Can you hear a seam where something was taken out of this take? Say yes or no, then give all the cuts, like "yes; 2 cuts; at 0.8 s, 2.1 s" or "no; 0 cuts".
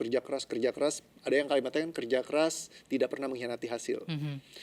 no; 0 cuts